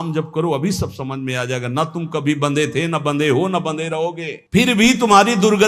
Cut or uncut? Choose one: uncut